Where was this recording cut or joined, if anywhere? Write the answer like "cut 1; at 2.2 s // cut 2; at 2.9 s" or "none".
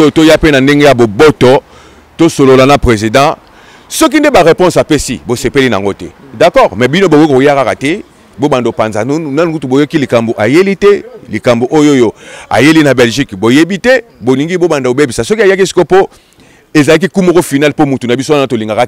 none